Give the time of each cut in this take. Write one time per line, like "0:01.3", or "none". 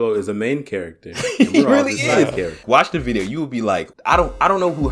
0:02.6
0:03.9